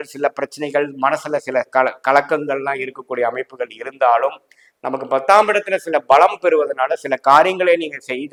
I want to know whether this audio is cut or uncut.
uncut